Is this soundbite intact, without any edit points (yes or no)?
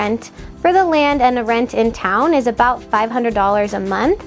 yes